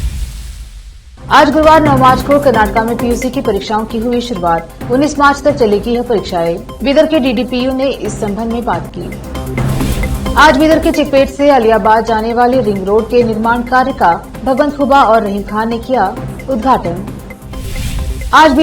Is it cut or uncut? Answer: cut